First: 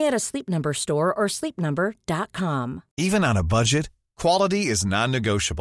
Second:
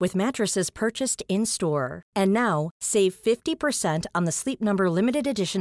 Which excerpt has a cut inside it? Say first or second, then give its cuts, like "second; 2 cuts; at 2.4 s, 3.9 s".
first; 1 cut; at 2.8 s